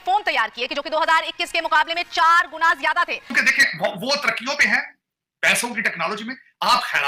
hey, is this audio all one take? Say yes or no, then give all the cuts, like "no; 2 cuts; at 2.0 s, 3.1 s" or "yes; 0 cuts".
no; 1 cut; at 3.4 s